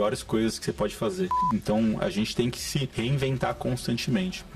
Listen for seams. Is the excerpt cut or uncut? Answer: cut